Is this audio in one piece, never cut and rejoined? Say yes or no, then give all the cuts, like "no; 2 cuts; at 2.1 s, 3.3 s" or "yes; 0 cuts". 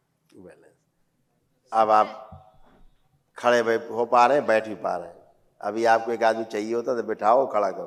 yes; 0 cuts